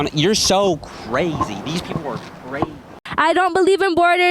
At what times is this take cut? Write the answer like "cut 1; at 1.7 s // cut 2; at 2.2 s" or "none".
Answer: cut 1; at 3.0 s

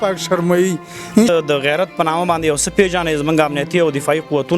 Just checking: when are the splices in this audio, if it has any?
cut 1; at 1.2 s

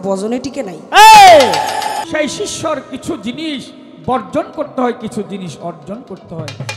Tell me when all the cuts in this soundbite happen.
cut 1; at 2.0 s

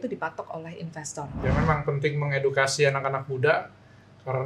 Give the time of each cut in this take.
cut 1; at 1.3 s

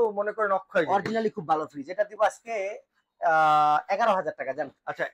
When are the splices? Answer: none

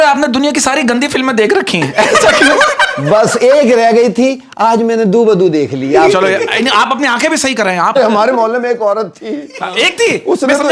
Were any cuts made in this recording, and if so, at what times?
cut 1; at 7.9 s

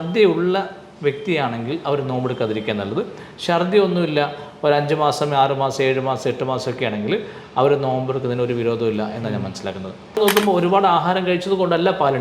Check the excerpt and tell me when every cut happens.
cut 1; at 10.2 s

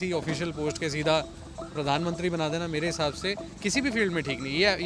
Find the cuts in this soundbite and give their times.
none

